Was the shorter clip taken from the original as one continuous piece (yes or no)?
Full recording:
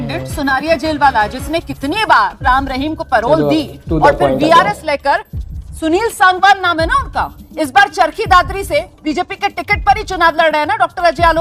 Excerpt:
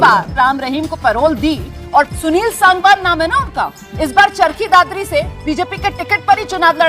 no